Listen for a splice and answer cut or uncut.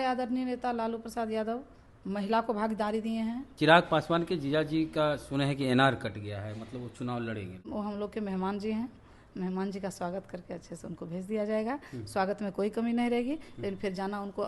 cut